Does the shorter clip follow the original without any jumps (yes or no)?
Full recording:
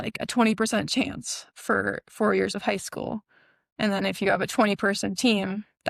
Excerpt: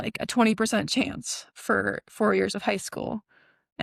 yes